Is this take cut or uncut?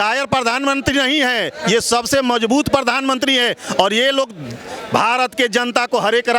uncut